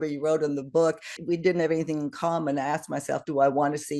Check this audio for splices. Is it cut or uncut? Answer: cut